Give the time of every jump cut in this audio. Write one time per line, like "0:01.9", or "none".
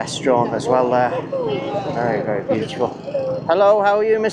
none